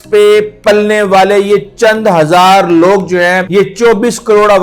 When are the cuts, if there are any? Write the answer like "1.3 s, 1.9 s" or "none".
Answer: 3.4 s